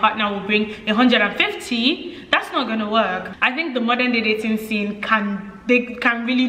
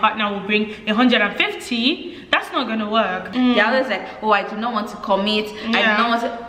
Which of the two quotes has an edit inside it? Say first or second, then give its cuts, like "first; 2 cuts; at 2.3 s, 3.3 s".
second; 1 cut; at 3.3 s